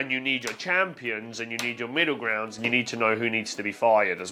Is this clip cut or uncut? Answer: uncut